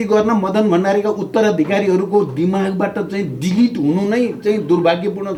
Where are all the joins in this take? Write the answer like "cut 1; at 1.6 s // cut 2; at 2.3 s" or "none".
none